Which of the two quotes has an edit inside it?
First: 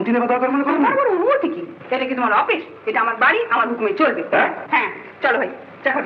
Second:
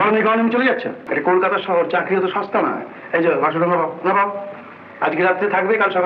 second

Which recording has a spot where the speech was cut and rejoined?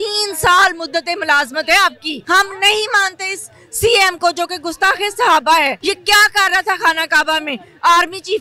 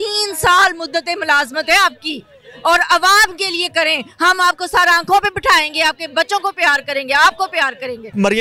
first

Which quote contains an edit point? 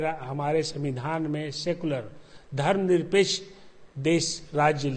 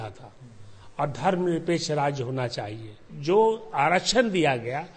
second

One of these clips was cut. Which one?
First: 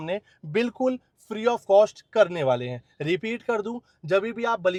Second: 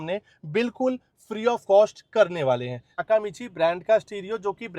second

